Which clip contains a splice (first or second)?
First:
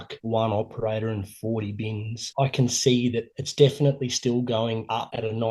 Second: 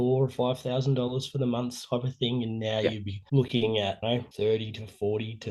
first